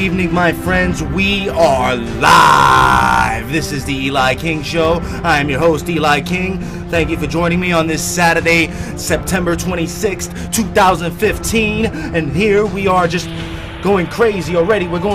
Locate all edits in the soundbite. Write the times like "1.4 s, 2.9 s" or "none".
none